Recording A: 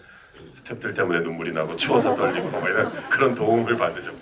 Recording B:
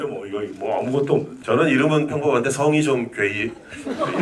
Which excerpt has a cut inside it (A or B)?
B